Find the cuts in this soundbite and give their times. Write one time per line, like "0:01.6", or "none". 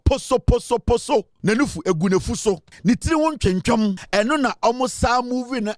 0:01.3
0:02.7
0:04.0